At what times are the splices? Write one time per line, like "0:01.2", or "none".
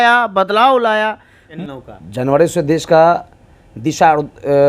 0:01.4